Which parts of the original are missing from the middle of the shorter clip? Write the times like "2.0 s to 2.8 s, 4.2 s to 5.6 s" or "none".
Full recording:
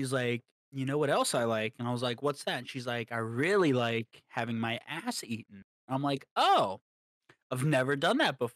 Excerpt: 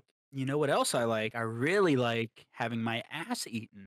1.7 s to 3.1 s

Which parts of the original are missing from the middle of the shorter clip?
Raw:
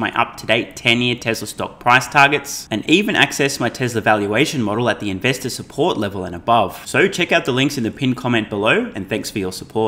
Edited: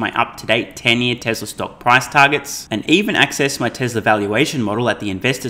none

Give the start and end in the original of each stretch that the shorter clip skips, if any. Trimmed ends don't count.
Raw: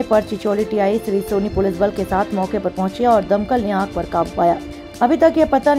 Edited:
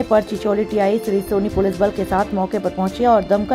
none

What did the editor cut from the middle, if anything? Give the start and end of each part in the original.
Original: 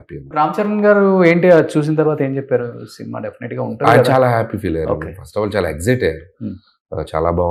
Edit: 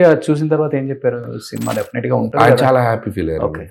none

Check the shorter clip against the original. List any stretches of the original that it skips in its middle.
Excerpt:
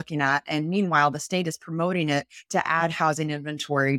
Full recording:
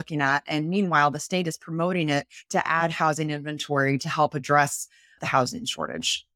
none

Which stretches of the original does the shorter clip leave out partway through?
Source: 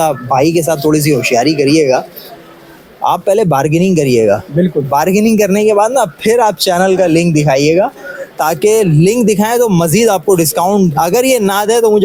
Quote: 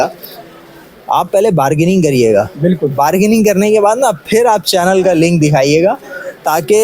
none

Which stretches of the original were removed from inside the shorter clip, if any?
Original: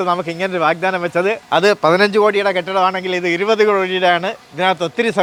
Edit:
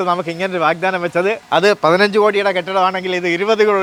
none

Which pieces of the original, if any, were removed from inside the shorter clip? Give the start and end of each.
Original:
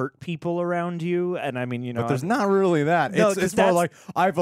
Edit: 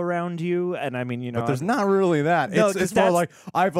none

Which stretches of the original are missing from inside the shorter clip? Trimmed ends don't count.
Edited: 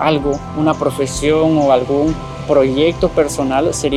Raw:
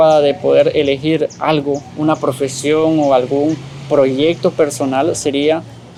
none

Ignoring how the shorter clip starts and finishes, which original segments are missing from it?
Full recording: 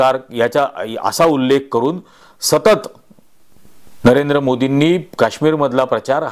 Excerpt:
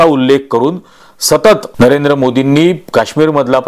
2.9 s to 3.9 s

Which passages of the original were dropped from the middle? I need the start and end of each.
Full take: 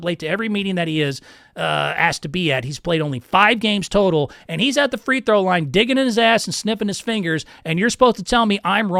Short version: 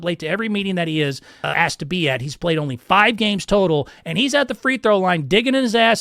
1.5 s to 1.9 s

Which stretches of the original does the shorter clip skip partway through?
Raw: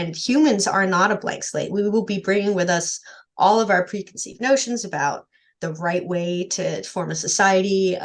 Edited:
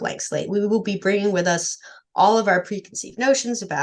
none

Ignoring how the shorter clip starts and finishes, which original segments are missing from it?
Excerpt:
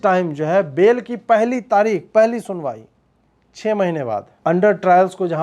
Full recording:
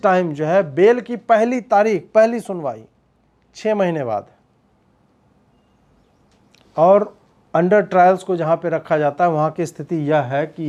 4.3 s to 7.4 s

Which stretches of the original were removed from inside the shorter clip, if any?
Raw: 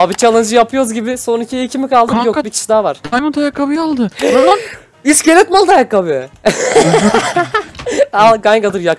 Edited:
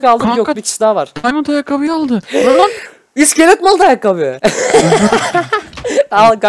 6.2 s to 6.3 s

